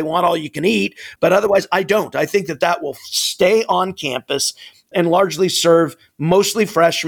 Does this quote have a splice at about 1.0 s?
yes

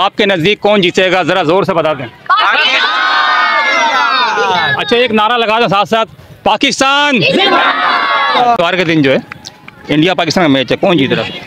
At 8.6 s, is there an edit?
yes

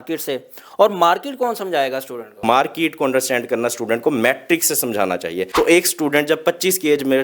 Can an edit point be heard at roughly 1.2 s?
no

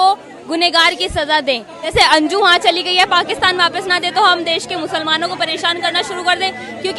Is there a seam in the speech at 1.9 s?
yes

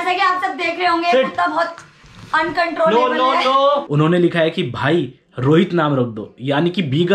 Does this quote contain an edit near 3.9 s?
yes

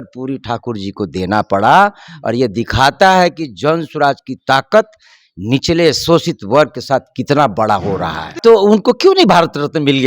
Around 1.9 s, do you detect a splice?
no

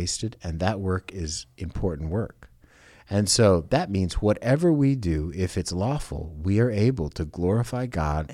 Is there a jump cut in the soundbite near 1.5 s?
no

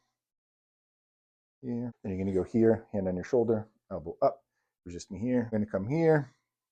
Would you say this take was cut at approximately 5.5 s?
yes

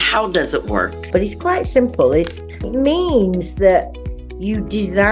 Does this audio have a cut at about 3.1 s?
no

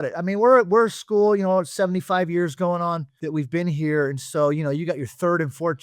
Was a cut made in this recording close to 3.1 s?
yes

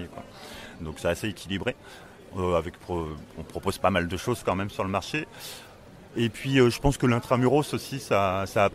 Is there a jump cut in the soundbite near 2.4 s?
no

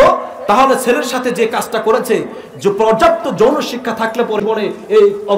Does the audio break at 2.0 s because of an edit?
no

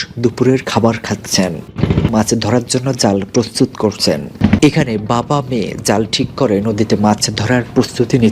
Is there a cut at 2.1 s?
yes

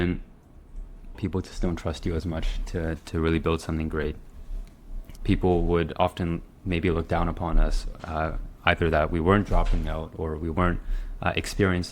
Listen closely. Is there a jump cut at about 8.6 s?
no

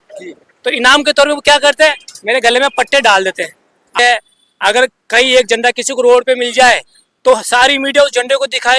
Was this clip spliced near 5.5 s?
no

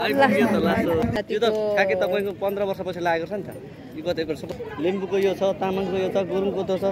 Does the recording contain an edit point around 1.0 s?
yes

